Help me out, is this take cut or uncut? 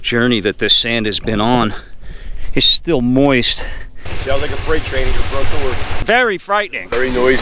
cut